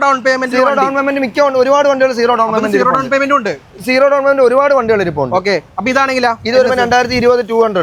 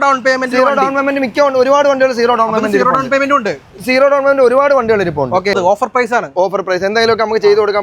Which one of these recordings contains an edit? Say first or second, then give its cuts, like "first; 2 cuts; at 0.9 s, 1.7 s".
second; 1 cut; at 5.5 s